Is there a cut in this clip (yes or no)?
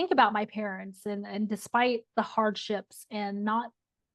no